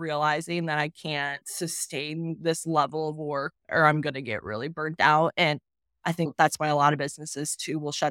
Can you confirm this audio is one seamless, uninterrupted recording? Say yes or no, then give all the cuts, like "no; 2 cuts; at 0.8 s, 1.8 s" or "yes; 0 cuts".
no; 2 cuts; at 1.4 s, 6.3 s